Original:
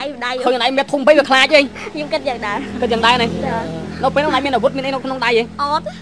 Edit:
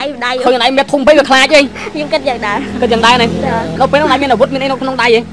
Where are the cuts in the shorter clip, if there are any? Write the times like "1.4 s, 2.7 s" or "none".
3.7 s